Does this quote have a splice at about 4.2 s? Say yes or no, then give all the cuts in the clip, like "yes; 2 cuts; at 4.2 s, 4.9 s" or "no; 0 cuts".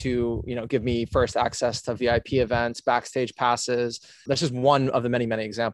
yes; 1 cut; at 4.2 s